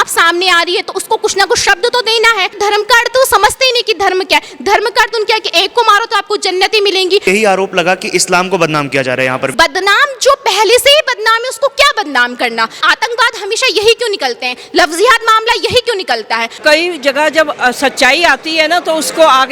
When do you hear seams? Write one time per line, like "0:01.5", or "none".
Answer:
0:02.6
0:07.2
0:09.5
0:12.8
0:16.6